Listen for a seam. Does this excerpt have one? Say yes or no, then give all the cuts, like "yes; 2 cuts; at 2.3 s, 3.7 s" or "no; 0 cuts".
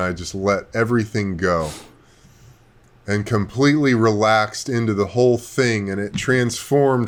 no; 0 cuts